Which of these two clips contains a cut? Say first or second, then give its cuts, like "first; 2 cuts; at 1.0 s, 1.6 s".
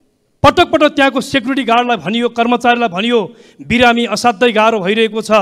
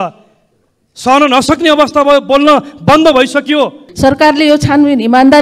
second; 1 cut; at 3.8 s